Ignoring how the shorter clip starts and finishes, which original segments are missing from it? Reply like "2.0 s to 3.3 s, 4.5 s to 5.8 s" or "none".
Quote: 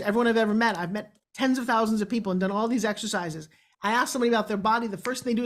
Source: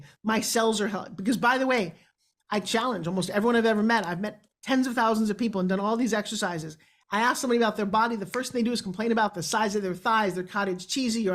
none